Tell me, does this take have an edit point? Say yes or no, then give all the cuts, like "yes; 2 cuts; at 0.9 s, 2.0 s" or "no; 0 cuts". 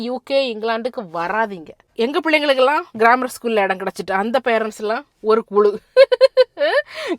yes; 1 cut; at 1.9 s